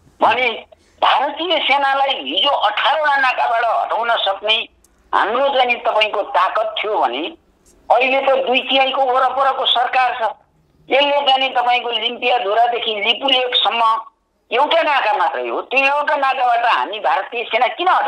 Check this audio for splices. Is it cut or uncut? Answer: uncut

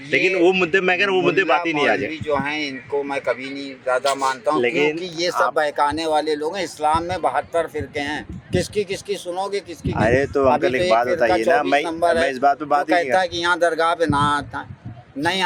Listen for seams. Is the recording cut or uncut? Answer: uncut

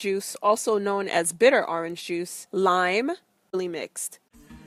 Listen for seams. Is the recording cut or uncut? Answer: uncut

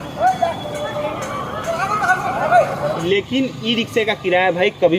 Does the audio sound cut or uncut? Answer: cut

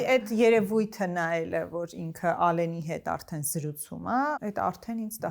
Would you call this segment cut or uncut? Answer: cut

